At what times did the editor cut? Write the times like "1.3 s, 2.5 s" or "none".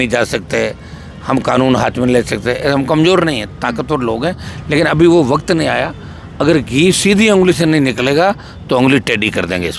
none